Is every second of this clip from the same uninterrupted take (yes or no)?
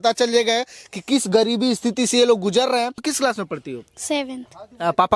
no